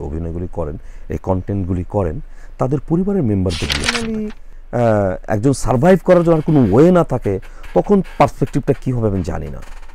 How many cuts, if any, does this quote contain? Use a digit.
1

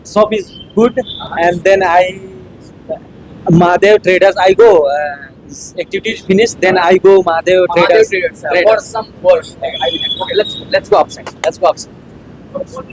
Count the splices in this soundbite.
0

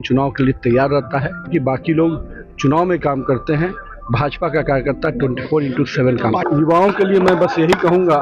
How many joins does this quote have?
2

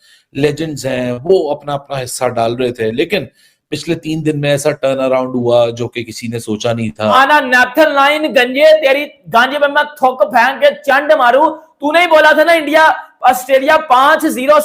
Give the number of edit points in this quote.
1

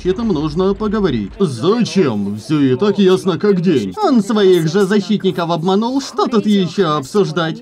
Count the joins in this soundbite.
2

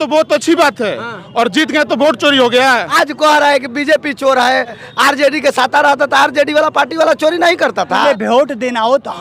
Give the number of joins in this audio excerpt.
3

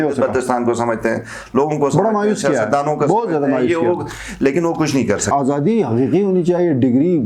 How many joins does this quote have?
1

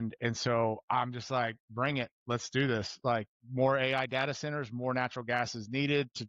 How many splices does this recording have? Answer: 0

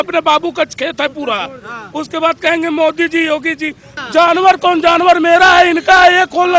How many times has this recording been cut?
1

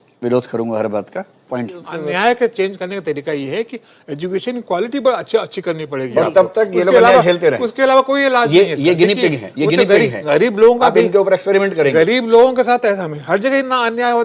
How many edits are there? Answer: 1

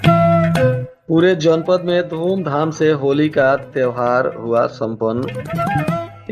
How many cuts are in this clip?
1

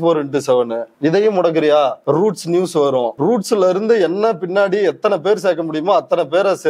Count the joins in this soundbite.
2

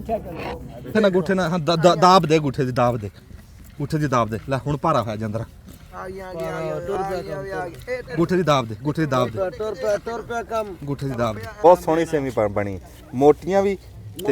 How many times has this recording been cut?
2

